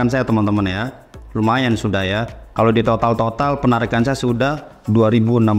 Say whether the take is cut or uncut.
uncut